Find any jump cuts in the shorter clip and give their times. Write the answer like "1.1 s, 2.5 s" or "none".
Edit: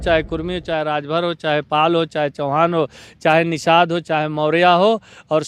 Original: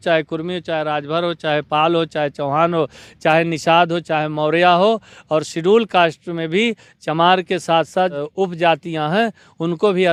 none